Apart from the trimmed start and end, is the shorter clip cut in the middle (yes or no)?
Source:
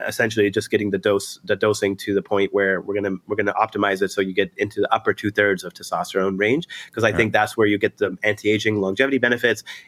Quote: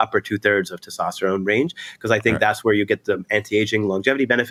no